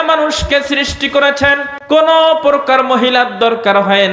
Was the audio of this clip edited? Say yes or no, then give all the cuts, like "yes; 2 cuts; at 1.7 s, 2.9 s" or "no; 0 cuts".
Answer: yes; 1 cut; at 1.7 s